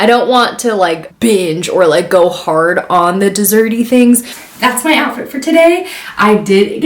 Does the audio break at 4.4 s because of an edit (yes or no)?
yes